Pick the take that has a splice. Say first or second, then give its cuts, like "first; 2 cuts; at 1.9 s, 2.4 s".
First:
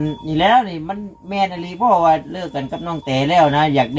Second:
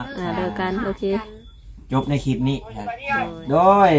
second; 1 cut; at 3.0 s